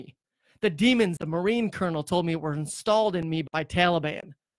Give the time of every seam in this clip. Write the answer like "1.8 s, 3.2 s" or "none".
1.2 s, 3.4 s